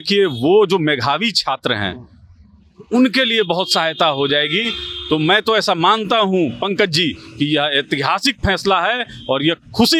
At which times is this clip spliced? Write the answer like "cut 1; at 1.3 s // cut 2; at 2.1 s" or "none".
none